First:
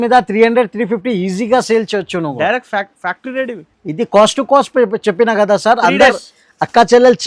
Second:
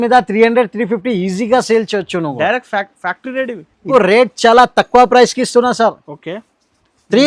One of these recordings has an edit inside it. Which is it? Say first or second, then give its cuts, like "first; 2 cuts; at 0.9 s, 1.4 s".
second; 1 cut; at 3.9 s